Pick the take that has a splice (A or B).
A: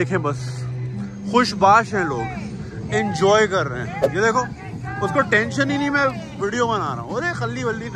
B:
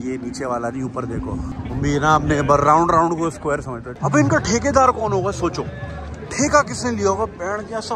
B